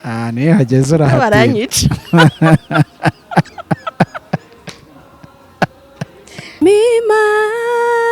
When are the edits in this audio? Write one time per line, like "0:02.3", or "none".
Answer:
0:06.6